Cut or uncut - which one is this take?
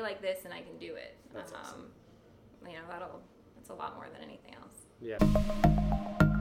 cut